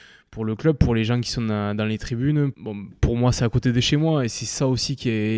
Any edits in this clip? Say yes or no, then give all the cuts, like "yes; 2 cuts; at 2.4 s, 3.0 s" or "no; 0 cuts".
yes; 1 cut; at 2.5 s